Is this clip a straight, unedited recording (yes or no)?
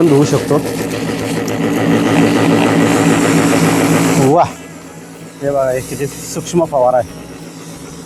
yes